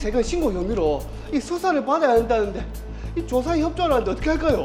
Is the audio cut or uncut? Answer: uncut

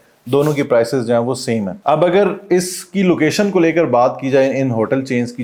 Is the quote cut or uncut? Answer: uncut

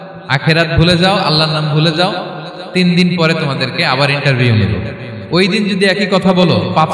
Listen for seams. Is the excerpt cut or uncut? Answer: uncut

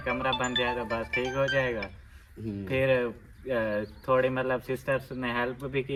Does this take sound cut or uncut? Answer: uncut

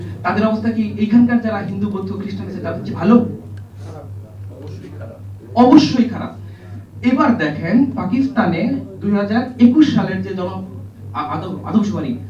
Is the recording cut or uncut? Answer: uncut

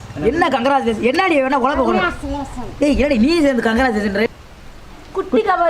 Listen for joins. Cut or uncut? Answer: cut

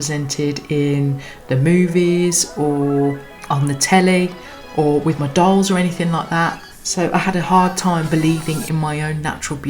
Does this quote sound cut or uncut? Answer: uncut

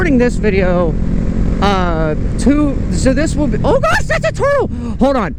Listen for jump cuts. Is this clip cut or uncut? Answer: uncut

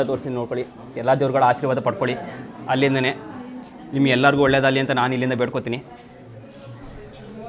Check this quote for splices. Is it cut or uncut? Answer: uncut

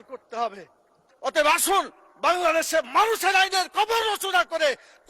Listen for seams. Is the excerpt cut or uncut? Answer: cut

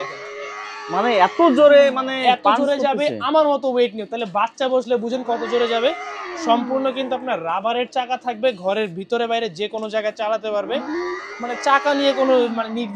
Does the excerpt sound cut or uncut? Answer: uncut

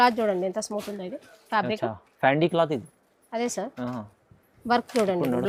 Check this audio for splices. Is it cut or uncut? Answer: uncut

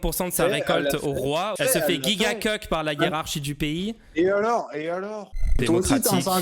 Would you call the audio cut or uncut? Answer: cut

